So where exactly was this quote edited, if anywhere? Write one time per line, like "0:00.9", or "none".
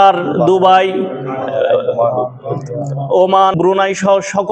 0:03.5